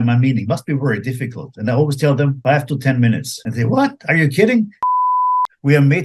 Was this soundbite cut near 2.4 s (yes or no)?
yes